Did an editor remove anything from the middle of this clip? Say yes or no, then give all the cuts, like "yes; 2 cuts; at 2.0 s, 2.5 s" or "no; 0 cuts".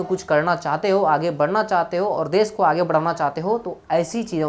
no; 0 cuts